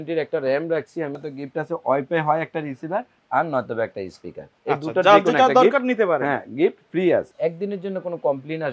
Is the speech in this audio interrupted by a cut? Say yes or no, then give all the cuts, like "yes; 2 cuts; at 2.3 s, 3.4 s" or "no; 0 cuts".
yes; 2 cuts; at 1.2 s, 7.3 s